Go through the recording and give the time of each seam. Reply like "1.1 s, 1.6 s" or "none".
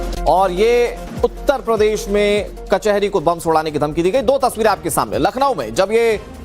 1.0 s